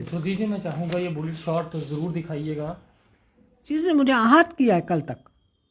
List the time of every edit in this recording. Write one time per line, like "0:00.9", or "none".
0:03.8